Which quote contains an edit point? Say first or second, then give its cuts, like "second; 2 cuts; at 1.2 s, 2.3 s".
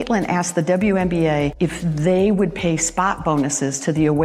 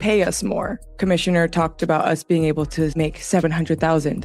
second; 1 cut; at 0.9 s